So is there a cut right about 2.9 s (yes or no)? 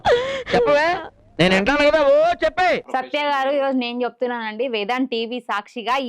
yes